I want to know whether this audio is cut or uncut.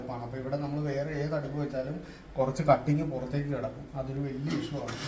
uncut